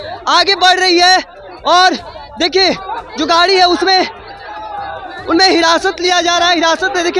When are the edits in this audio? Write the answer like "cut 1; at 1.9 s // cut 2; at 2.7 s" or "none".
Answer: none